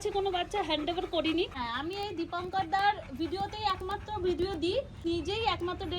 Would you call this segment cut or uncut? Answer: cut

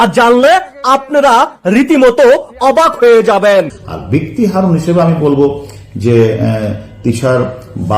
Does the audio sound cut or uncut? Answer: cut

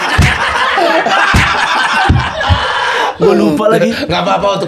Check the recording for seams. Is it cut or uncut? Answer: uncut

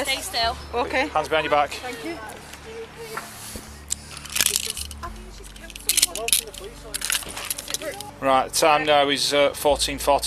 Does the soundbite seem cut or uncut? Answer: cut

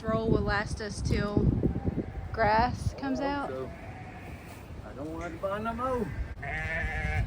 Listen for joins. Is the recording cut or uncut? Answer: cut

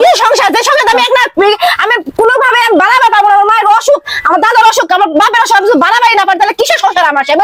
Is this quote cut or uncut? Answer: uncut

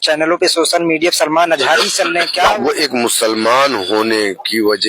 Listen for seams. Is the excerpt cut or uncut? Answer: cut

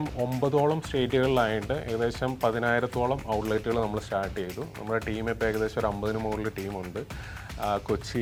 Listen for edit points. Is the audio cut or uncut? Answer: uncut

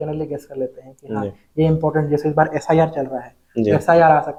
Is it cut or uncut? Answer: uncut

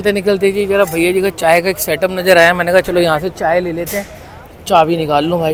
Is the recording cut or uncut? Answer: uncut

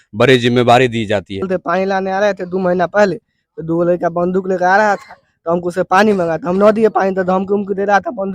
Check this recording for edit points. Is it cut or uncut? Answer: cut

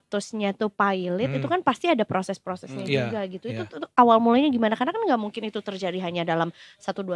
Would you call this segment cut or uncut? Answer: uncut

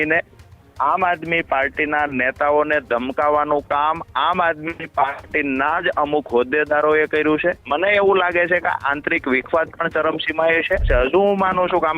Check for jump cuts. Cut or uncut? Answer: cut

